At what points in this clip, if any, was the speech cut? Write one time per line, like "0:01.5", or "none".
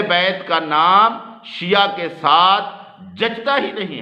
none